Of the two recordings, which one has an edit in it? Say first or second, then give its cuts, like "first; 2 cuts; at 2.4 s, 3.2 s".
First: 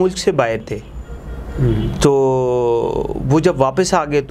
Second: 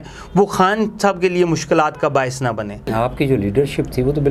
second; 1 cut; at 2.9 s